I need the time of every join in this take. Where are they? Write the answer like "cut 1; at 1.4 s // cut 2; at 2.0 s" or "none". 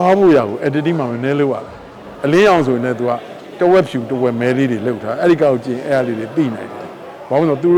cut 1; at 2.1 s